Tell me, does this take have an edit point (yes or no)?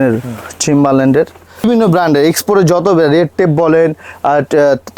yes